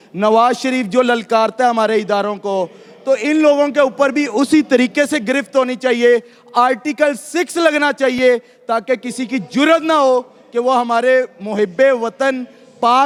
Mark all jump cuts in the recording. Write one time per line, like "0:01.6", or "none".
none